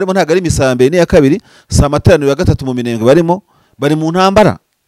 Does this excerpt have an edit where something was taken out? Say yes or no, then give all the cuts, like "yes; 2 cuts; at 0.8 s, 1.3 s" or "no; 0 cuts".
no; 0 cuts